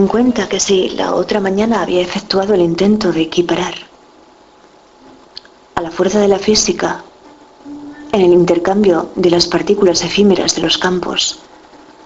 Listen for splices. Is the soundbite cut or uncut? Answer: cut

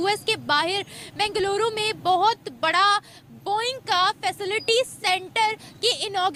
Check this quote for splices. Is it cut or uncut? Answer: uncut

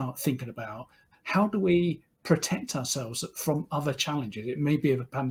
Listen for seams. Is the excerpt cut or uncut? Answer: uncut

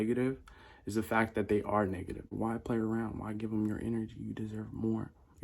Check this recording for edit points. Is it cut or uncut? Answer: cut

